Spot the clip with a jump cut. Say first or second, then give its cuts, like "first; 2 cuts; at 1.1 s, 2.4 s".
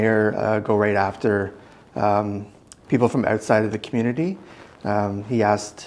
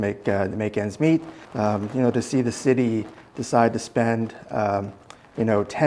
second; 1 cut; at 1.4 s